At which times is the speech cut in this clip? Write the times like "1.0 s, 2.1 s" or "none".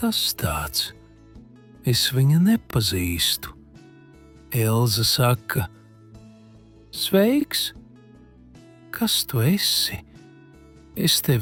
none

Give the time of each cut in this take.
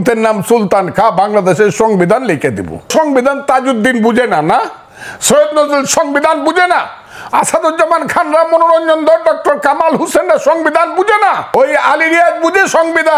2.9 s, 11.4 s

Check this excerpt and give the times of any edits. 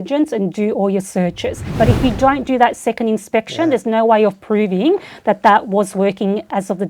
1.6 s

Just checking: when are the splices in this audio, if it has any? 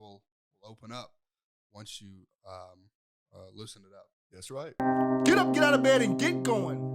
4.7 s

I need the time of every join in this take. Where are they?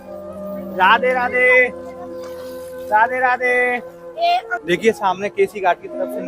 4.5 s

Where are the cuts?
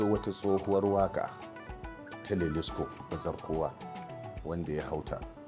none

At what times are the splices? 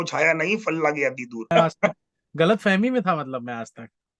1.4 s

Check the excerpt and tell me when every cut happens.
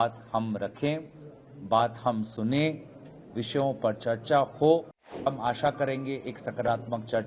5.3 s

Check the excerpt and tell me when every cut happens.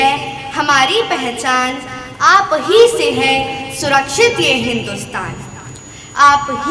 none

